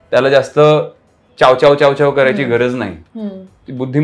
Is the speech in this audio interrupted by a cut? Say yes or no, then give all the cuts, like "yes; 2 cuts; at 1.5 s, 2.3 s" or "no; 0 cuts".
no; 0 cuts